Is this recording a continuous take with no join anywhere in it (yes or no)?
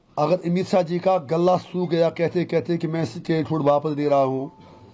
yes